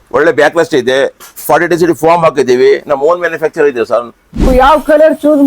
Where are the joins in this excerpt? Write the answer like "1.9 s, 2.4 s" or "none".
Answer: 4.5 s